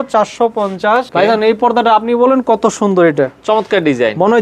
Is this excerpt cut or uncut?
cut